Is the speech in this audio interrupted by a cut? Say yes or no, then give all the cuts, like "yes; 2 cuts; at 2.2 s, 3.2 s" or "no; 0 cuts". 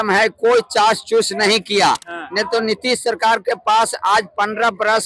no; 0 cuts